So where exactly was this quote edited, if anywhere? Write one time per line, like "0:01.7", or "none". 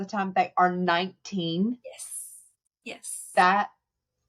none